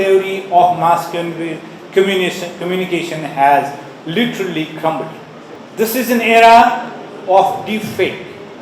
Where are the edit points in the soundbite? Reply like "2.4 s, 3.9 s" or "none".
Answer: none